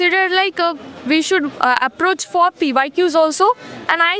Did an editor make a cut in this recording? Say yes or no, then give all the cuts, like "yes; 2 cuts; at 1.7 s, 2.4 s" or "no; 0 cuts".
no; 0 cuts